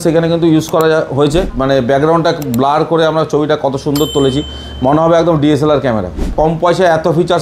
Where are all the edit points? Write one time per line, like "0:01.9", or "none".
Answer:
0:01.5
0:06.3